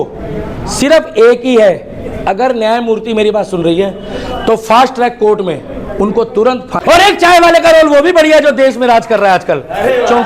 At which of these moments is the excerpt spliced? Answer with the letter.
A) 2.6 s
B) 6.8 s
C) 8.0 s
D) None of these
B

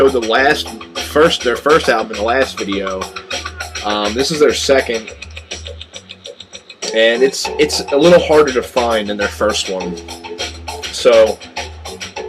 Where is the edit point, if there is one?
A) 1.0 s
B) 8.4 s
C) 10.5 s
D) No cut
B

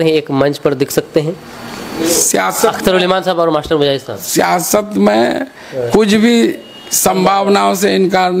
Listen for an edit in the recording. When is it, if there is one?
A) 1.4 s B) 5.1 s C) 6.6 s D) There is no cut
D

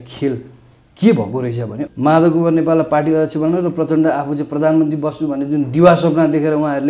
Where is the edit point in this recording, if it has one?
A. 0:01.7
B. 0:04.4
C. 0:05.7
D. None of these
A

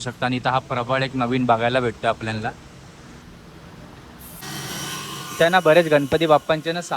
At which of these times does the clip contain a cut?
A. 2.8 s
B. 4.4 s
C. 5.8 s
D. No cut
B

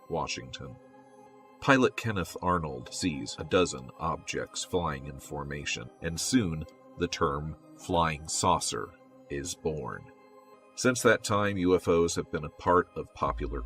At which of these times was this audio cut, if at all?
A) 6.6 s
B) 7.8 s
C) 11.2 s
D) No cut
C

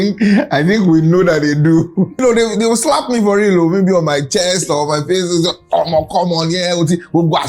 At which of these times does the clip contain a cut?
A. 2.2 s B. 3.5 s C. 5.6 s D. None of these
A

